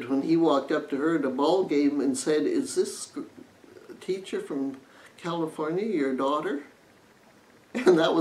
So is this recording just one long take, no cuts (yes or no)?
yes